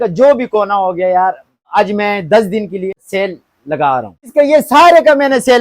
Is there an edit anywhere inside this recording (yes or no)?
yes